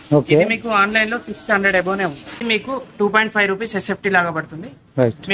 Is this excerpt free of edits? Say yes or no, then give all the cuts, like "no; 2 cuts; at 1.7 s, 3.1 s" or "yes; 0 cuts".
no; 1 cut; at 2.4 s